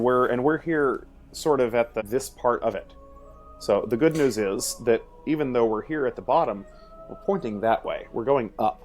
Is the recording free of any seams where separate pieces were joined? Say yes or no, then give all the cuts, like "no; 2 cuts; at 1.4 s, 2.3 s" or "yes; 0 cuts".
no; 1 cut; at 2.0 s